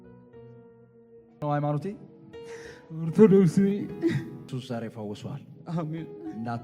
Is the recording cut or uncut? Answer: cut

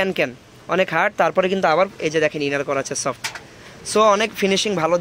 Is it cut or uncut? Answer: uncut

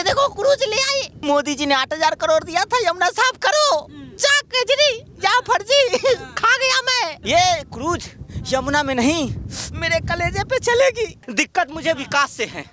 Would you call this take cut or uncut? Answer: cut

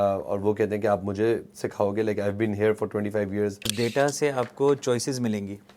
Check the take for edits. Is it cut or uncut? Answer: cut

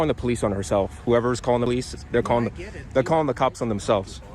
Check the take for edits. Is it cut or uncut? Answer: uncut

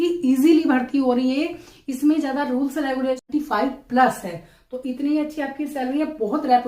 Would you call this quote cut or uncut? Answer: cut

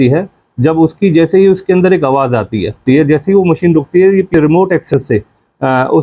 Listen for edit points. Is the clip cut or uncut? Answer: cut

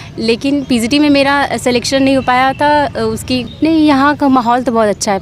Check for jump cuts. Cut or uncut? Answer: cut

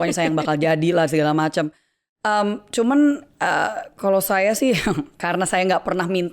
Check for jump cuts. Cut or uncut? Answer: uncut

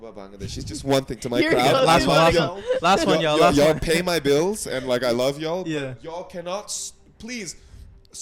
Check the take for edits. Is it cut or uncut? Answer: uncut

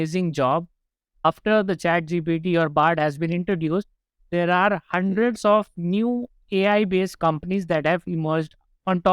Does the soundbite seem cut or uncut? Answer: cut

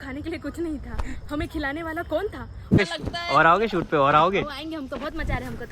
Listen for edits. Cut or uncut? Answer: cut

